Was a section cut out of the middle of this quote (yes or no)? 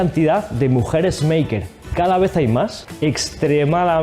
yes